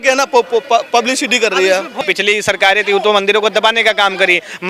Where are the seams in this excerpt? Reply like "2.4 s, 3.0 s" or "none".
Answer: 2.0 s